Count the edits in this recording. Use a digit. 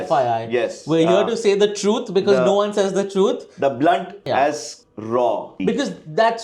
2